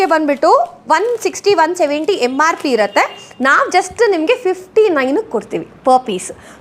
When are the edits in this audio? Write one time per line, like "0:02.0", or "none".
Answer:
none